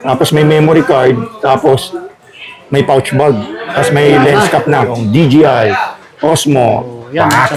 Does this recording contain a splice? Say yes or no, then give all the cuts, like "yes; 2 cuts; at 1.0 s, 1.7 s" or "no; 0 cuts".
yes; 1 cut; at 5.0 s